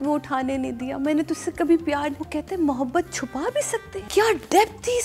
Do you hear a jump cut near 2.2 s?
yes; 2 cuts; at 2.2 s, 4.0 s

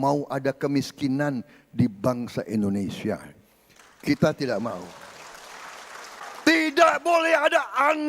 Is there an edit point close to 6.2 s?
yes; 1 cut; at 6.2 s

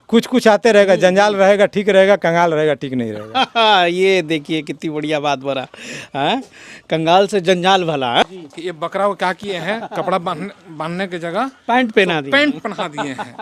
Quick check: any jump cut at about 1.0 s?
no; 1 cut; at 8.2 s

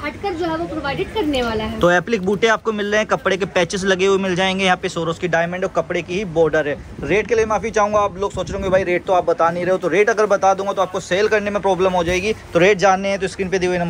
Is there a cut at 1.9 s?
no; 0 cuts

